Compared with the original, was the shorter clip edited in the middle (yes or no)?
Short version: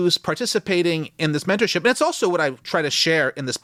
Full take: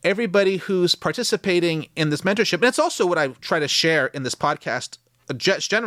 no